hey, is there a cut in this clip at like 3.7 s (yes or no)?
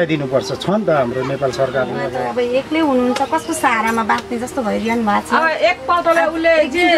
no